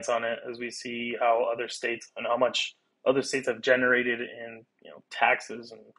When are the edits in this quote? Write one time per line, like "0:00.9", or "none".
none